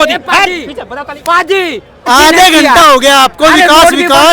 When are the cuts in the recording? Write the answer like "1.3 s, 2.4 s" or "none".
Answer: 2.1 s